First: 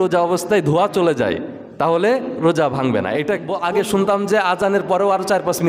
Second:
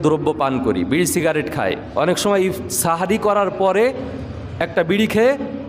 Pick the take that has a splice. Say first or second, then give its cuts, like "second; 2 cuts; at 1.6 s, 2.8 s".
first; 1 cut; at 3.5 s